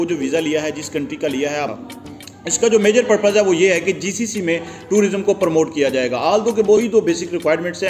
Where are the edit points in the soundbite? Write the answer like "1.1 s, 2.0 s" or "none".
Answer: 1.7 s, 6.8 s